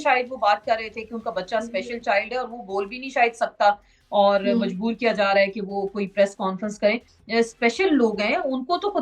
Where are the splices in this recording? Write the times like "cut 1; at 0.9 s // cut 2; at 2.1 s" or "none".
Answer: cut 1; at 7.1 s

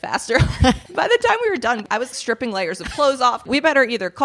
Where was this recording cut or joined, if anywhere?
cut 1; at 0.8 s // cut 2; at 2.1 s // cut 3; at 3.4 s

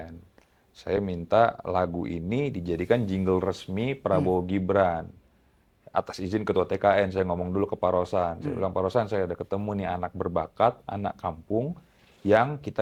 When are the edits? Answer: none

